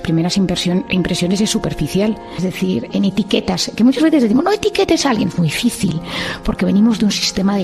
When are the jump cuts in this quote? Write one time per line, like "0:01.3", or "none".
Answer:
0:02.4

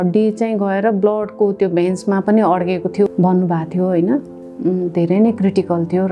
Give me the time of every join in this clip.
0:03.1

